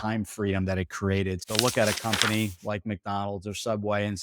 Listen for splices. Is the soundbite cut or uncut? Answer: cut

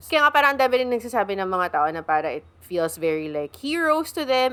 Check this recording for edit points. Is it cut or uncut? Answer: uncut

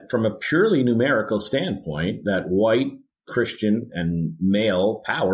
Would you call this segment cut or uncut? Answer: uncut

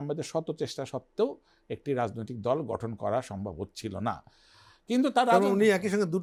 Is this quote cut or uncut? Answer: uncut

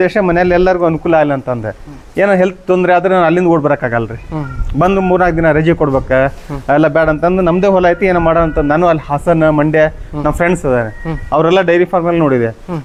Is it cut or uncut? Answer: uncut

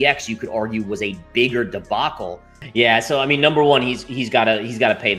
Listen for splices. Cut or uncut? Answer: cut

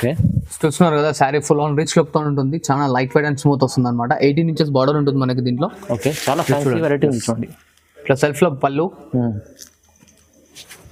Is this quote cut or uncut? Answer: uncut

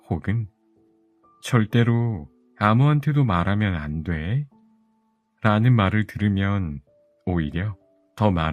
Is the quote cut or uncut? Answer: uncut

